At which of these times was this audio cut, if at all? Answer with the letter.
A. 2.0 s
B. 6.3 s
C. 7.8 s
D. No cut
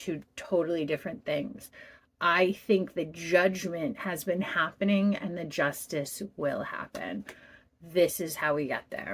D